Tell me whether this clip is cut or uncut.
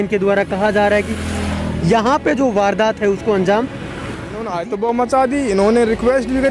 cut